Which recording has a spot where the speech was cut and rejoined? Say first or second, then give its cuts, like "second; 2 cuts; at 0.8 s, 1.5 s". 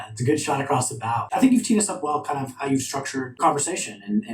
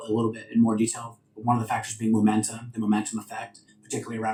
first; 2 cuts; at 1.3 s, 3.4 s